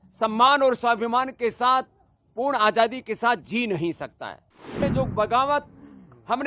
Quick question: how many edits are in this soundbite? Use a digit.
1